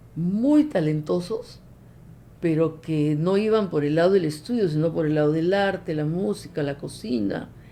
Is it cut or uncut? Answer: uncut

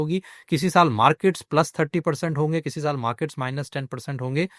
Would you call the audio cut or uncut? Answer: uncut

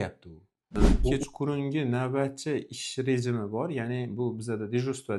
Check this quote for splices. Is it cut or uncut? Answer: cut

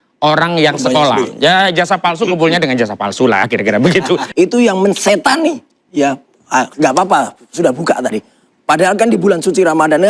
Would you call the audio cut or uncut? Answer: cut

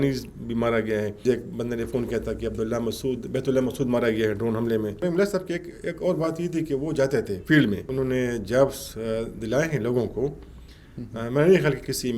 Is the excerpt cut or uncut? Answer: cut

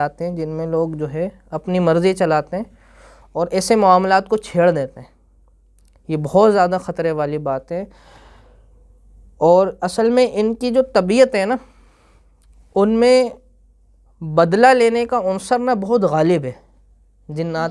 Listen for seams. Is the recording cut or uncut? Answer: uncut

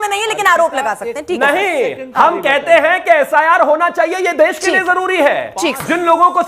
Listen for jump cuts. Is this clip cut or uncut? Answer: uncut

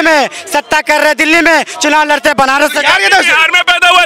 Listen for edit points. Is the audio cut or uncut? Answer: uncut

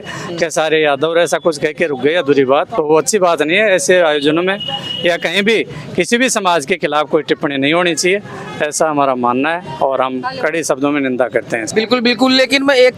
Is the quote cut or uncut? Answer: uncut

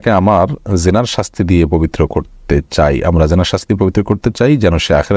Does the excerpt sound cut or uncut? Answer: uncut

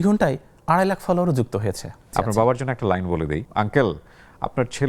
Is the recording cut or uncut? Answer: cut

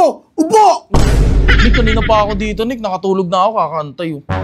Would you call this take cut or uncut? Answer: uncut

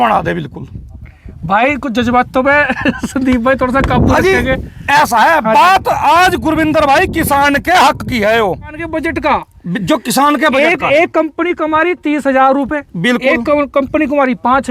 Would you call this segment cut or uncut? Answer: cut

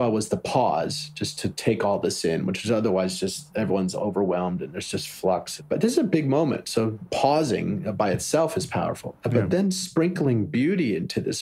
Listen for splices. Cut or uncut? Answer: uncut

